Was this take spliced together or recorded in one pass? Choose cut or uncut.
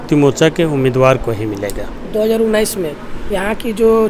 uncut